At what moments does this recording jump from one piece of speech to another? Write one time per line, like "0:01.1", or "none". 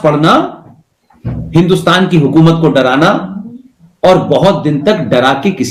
none